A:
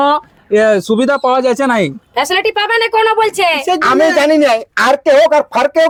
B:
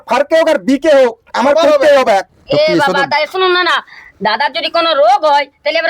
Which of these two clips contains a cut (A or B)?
B